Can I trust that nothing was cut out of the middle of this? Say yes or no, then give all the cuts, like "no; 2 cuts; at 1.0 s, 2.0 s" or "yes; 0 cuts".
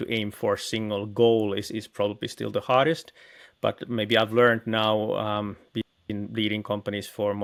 yes; 0 cuts